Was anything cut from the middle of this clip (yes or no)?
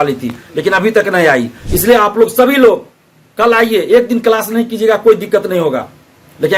yes